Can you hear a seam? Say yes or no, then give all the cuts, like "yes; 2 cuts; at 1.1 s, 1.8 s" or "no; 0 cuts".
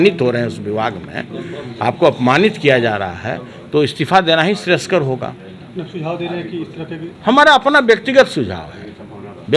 no; 0 cuts